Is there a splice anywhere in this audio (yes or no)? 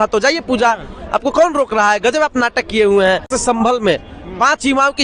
yes